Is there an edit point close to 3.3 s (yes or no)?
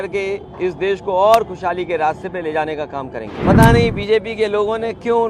yes